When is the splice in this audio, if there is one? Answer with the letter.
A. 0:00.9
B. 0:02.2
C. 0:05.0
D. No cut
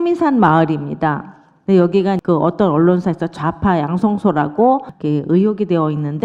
B